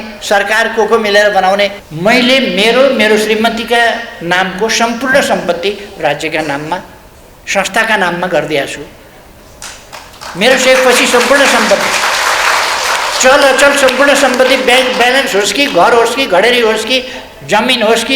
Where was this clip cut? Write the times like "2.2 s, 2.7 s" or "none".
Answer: 1.8 s